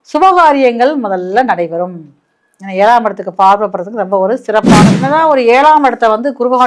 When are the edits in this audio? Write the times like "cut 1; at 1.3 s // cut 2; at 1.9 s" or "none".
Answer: cut 1; at 5.0 s